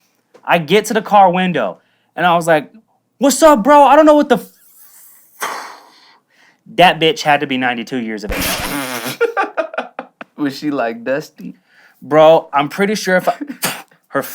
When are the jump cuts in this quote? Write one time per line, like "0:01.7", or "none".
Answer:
0:10.1